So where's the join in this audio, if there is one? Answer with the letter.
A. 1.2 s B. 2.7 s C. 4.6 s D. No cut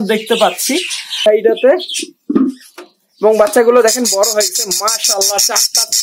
A